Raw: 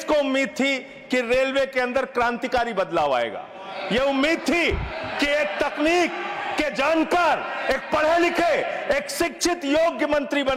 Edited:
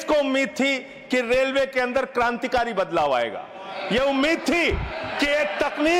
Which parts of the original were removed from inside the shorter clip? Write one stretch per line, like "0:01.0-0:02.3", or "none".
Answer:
none